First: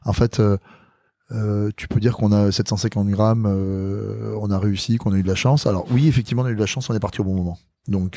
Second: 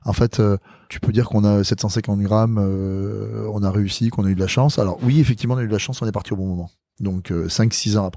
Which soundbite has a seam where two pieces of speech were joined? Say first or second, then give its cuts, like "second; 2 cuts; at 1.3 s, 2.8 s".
second; 1 cut; at 0.9 s